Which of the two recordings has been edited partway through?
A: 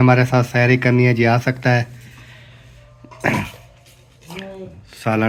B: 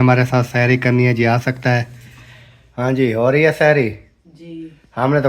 B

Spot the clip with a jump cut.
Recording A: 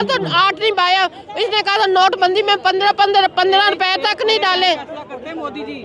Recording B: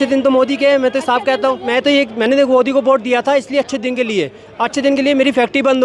B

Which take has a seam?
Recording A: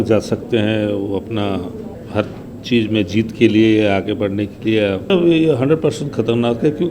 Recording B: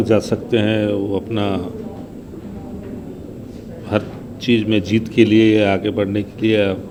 A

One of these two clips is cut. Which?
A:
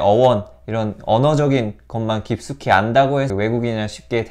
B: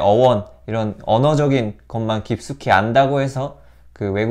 A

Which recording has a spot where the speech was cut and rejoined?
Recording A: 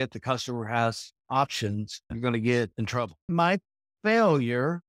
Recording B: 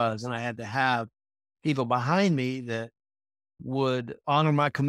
A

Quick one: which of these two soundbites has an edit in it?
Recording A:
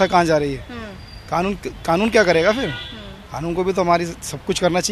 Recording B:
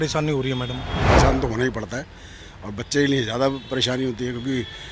B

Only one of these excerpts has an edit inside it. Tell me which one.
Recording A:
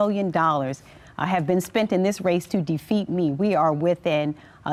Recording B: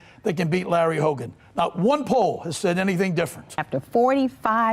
B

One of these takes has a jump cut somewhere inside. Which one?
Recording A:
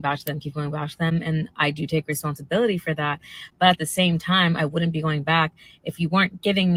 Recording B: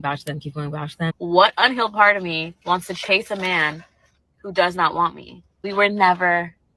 B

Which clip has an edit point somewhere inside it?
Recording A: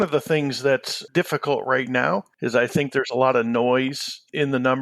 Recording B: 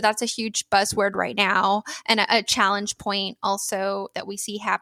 A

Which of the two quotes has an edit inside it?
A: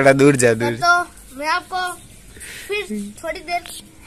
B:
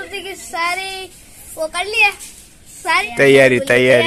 B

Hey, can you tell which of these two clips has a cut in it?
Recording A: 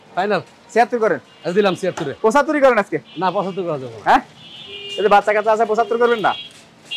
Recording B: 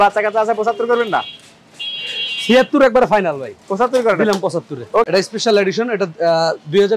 B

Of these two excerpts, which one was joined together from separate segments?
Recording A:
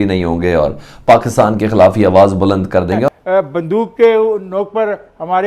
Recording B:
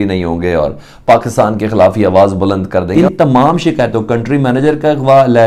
A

